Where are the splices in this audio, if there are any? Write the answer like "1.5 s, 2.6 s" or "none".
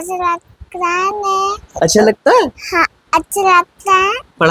1.6 s